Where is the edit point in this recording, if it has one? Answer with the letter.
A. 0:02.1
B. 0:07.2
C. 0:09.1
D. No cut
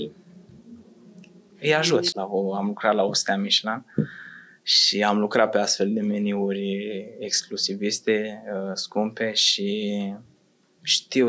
A